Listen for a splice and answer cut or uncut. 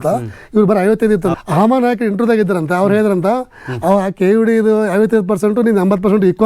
cut